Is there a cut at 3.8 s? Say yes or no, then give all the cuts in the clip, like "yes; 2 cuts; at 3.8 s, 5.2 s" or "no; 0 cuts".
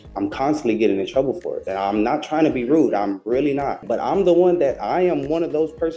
yes; 1 cut; at 3.8 s